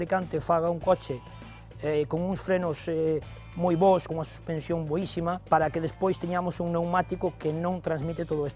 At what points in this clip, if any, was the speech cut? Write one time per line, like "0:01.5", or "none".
0:04.1